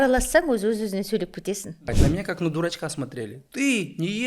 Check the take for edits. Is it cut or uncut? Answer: cut